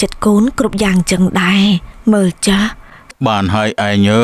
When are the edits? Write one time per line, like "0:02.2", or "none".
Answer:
0:03.1